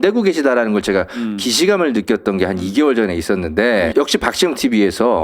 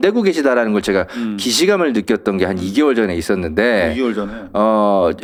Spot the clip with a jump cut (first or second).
first